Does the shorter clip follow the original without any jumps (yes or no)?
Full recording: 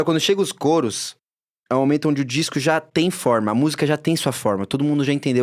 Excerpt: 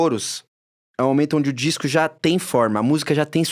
yes